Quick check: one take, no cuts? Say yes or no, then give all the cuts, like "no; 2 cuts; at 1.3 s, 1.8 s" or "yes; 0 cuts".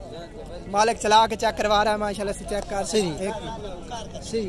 yes; 0 cuts